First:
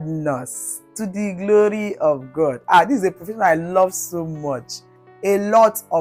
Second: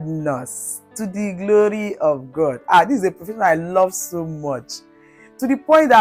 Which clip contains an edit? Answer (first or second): first